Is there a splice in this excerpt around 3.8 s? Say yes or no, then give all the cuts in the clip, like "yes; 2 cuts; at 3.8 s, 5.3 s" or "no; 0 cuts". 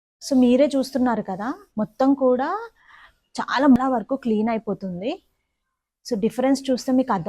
yes; 1 cut; at 3.8 s